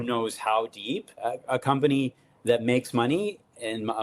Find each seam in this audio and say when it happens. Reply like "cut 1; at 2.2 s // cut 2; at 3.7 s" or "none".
cut 1; at 1.2 s